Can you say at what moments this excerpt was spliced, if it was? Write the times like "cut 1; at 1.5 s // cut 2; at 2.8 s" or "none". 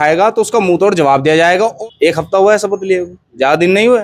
cut 1; at 1.8 s

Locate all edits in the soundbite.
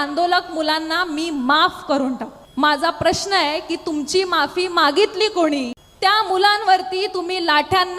cut 1; at 2.4 s // cut 2; at 5.8 s

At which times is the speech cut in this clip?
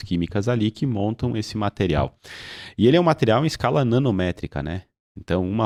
none

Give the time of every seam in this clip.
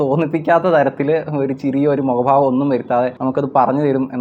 none

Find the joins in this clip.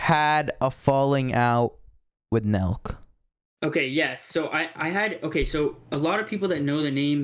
none

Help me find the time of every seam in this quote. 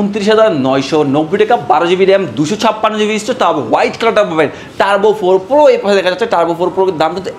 none

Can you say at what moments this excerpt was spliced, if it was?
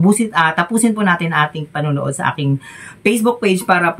none

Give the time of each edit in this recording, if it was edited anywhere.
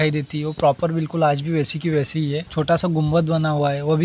cut 1; at 2.5 s

